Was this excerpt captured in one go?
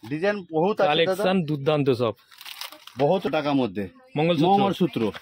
no; 1 cut; at 3.3 s

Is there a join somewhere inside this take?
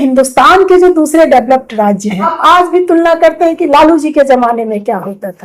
yes; 1 cut; at 2.3 s

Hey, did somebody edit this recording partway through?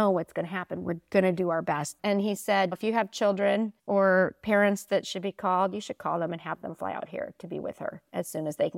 yes; 2 cuts; at 2.0 s, 3.8 s

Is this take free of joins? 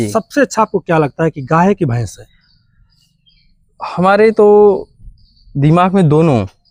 yes; 0 cuts

